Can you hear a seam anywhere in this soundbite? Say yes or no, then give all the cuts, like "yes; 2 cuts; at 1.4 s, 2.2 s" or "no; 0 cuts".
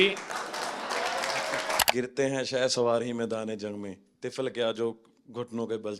yes; 1 cut; at 1.8 s